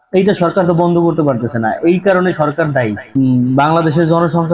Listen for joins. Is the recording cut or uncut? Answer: cut